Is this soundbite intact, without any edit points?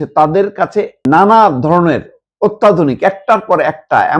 no; 1 cut; at 1.0 s

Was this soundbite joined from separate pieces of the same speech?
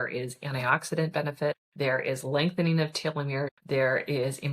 yes; 2 cuts; at 1.7 s, 3.6 s

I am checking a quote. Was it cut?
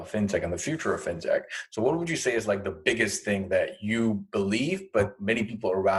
no; 0 cuts

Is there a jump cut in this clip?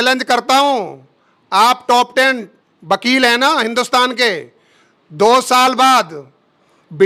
no; 0 cuts

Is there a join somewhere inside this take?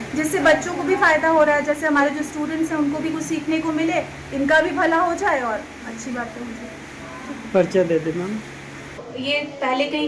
yes; 1 cut; at 9.1 s

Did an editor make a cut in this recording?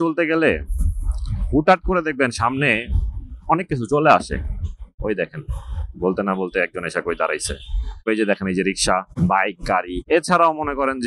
yes; 3 cuts; at 5.0 s, 8.0 s, 10.0 s

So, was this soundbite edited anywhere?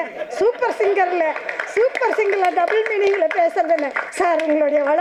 no; 0 cuts

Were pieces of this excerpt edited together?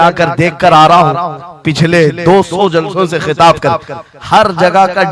no; 0 cuts

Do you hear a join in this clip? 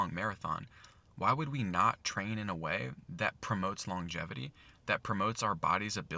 no; 0 cuts

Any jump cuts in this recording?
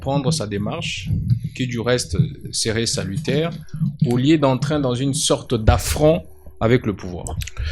no; 0 cuts

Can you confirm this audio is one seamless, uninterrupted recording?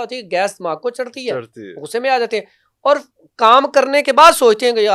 yes; 0 cuts

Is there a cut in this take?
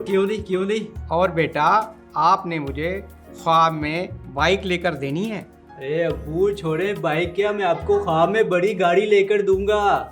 no; 0 cuts

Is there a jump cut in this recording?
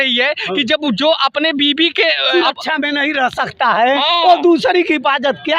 yes; 1 cut; at 2.3 s

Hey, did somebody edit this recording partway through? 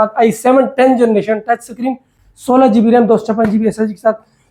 no; 0 cuts

